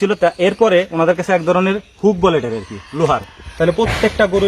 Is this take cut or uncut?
cut